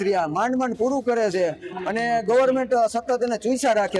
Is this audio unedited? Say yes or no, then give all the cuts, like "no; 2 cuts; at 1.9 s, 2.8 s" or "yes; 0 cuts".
yes; 0 cuts